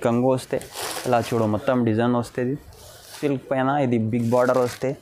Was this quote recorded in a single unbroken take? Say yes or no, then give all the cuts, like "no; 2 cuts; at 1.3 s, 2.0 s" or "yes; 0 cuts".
no; 1 cut; at 3.1 s